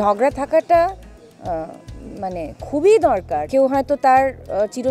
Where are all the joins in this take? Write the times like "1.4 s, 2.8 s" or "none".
3.5 s